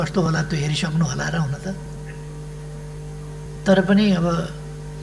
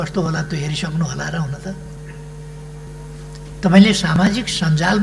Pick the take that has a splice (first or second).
second